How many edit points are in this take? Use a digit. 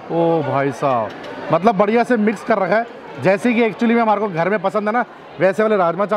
0